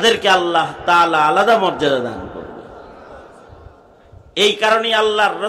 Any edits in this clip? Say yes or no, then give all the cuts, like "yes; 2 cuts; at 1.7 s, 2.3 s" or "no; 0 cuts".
yes; 1 cut; at 4.1 s